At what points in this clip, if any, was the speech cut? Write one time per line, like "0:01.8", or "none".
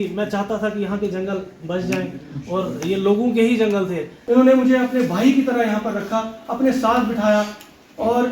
0:04.1